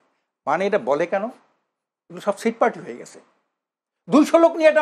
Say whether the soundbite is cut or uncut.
uncut